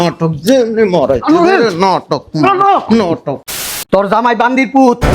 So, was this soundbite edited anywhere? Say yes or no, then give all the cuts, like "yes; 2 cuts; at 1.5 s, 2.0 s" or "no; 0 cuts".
yes; 1 cut; at 3.7 s